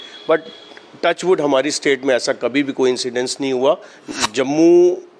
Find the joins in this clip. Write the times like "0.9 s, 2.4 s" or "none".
4.0 s

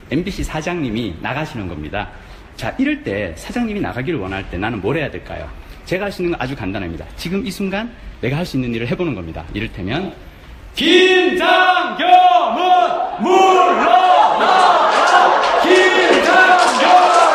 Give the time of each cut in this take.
none

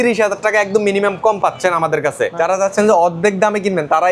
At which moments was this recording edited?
2.3 s

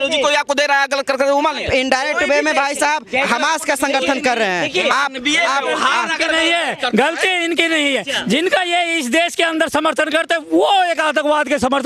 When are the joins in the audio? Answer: none

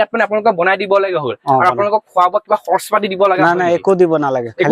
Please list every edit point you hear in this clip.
none

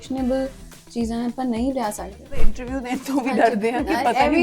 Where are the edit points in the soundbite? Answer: 2.6 s

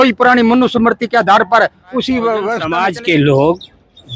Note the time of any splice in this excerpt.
2.6 s

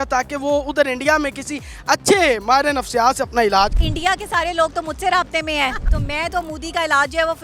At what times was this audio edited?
3.9 s, 5.9 s

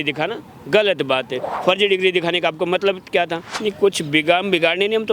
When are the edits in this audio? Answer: 1.5 s, 3.5 s

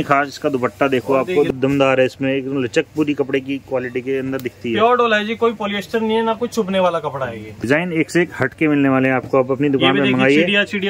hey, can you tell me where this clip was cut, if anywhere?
1.5 s, 7.7 s

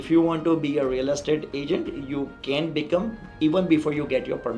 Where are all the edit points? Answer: none

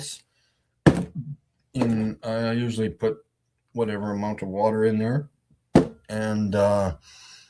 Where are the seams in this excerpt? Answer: 6.6 s

